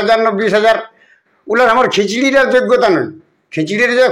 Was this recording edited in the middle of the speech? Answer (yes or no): no